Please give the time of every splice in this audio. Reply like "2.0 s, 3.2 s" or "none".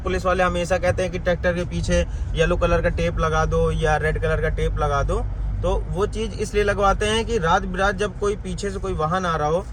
none